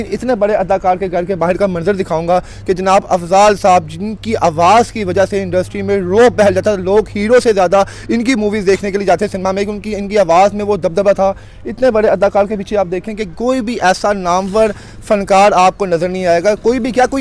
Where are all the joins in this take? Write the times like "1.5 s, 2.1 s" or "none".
none